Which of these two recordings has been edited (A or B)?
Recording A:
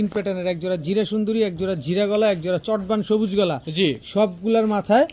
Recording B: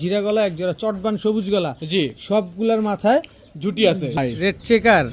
B